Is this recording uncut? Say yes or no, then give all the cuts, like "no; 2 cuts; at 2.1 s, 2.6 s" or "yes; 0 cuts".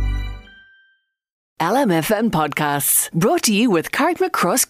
no; 1 cut; at 1.4 s